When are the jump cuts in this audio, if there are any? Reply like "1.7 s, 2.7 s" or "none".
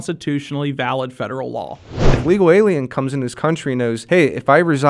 2.1 s, 4.0 s